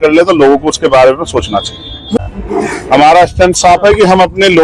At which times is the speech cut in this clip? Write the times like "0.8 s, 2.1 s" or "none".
2.2 s